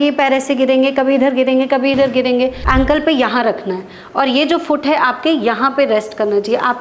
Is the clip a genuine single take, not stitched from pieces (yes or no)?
no